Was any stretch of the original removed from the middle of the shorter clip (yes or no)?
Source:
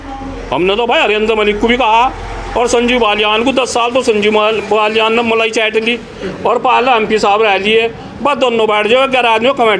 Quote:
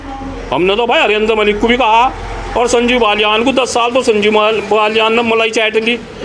no